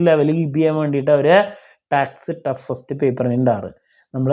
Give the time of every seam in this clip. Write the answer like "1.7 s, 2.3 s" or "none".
none